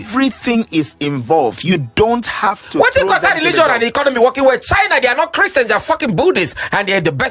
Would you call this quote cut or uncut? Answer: uncut